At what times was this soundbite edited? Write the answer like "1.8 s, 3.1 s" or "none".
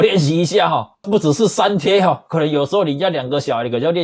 1.0 s